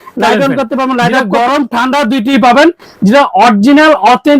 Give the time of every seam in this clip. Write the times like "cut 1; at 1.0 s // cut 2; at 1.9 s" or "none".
cut 1; at 1.1 s